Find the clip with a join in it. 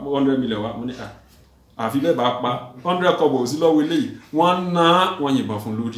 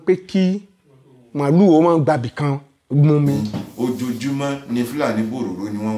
second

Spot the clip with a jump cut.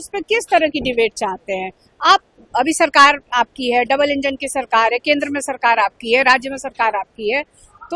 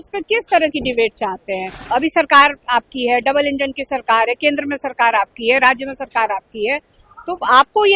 second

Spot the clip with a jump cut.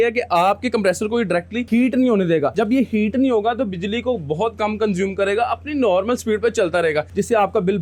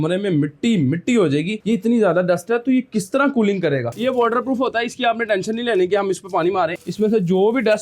second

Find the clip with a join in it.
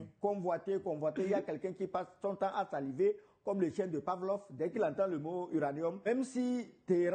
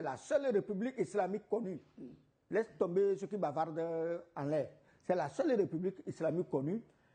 first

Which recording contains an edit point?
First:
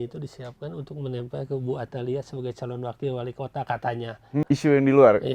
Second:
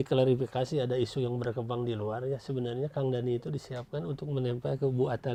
first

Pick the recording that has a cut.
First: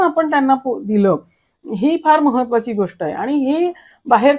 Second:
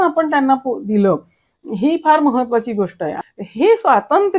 second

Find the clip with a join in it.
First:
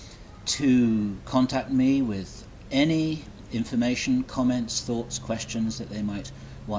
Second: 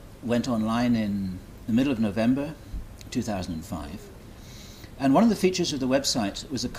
first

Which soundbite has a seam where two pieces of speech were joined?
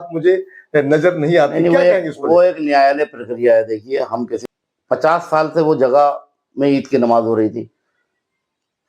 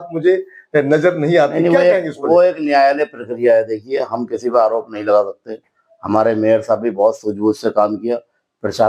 first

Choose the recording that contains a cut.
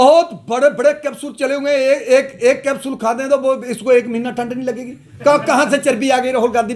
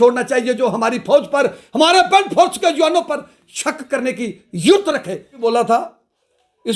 second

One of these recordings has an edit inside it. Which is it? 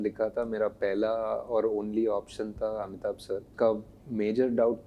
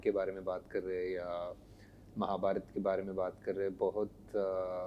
first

